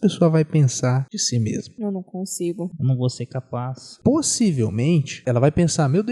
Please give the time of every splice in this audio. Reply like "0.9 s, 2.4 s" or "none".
1.5 s, 2.7 s, 3.8 s, 5.2 s